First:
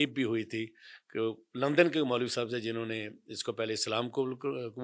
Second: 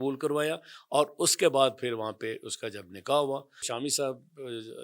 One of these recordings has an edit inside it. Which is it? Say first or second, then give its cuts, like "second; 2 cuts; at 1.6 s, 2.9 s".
second; 1 cut; at 3.7 s